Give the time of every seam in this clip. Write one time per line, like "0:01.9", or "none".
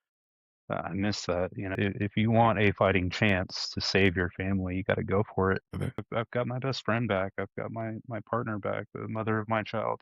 0:01.8
0:06.1